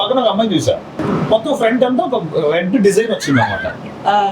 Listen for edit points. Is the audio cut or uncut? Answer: cut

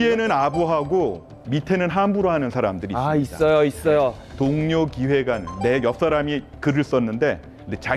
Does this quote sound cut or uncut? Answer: cut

